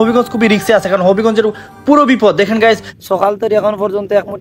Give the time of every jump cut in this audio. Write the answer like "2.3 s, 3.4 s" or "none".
2.9 s

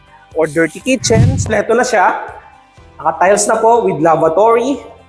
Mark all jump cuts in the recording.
1.2 s

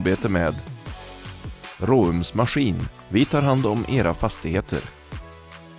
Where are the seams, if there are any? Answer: none

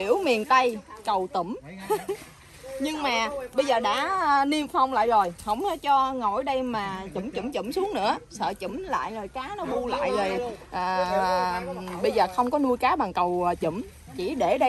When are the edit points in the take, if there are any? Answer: none

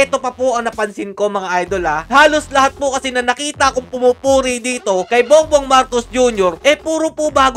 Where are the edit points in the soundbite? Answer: 2.0 s

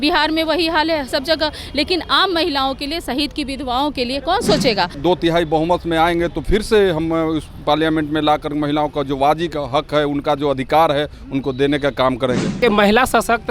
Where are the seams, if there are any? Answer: 4.9 s, 12.6 s

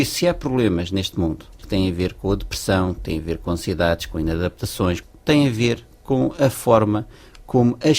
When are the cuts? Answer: 1.6 s, 5.0 s

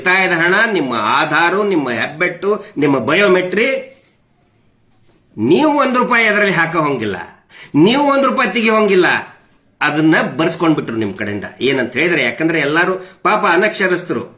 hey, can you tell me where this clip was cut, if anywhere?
none

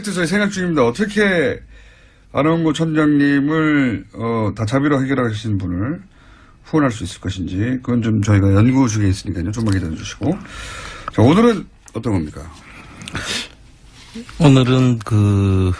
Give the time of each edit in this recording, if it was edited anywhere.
none

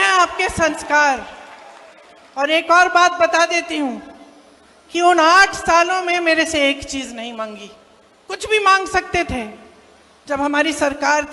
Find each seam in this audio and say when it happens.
none

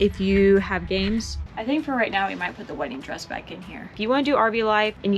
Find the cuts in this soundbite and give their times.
1.4 s, 3.9 s

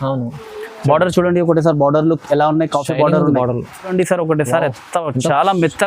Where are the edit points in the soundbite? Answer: 3.9 s

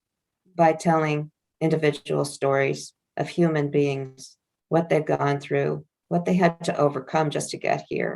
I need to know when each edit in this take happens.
1.4 s, 5.9 s

